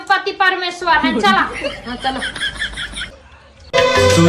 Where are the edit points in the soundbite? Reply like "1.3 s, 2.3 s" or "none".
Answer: 3.1 s